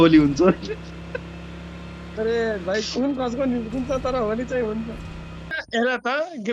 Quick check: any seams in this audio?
yes; 1 cut; at 5.6 s

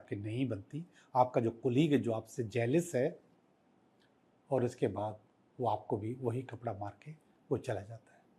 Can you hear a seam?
no; 0 cuts

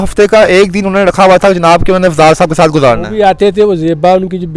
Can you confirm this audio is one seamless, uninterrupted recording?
yes; 0 cuts

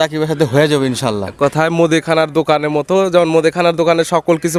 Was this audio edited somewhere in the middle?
no; 0 cuts

